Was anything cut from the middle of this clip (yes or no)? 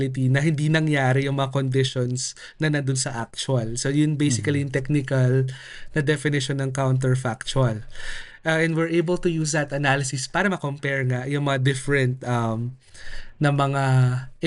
no